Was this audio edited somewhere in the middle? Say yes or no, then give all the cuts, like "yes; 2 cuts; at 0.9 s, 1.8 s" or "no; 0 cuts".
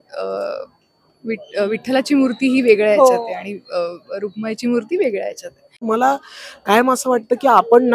yes; 1 cut; at 5.7 s